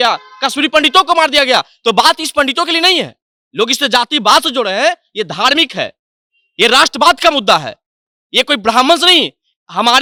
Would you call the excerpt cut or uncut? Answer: uncut